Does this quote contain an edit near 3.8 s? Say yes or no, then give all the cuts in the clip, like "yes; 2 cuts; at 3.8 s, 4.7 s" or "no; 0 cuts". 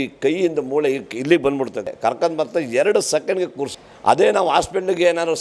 yes; 2 cuts; at 1.9 s, 3.8 s